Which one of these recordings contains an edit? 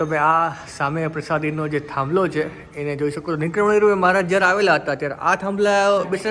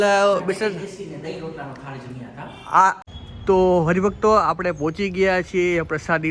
second; 1 cut; at 3.0 s

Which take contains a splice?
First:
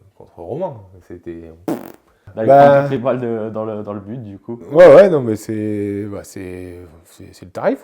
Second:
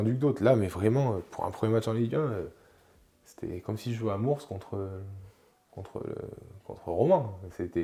first; 1 cut; at 2.3 s

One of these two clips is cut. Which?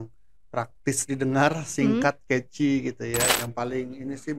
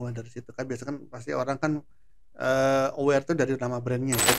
first; 1 cut; at 3.3 s

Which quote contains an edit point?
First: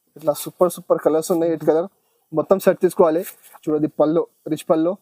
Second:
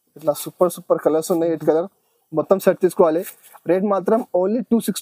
first; 1 cut; at 3.5 s

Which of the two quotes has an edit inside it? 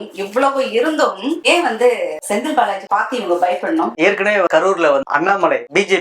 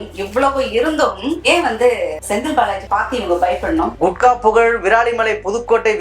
second; 1 cut; at 3.9 s

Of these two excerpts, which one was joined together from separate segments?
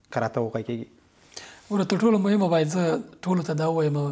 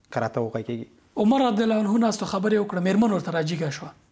second; 1 cut; at 1.0 s

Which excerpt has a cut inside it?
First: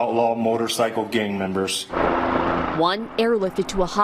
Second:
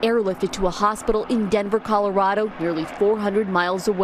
first; 1 cut; at 1.8 s

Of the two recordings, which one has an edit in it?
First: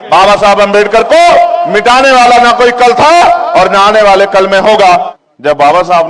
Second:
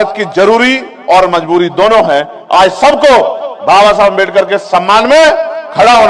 first; 1 cut; at 5.1 s

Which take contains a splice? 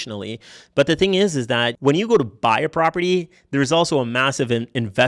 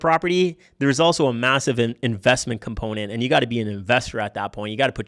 first; 1 cut; at 1.7 s

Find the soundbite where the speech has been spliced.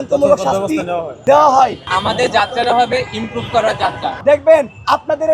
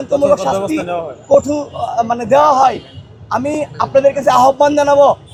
first; 3 cuts; at 1.2 s, 1.9 s, 4.1 s

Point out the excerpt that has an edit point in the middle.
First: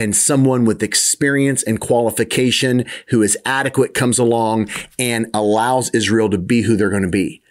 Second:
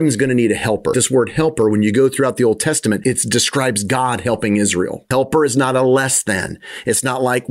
second; 3 cuts; at 0.9 s, 3.0 s, 5.0 s

